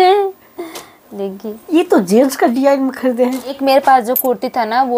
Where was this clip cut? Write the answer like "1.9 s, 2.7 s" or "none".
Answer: 3.5 s